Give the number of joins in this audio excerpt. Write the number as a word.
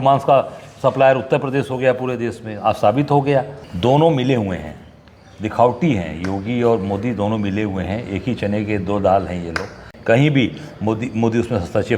two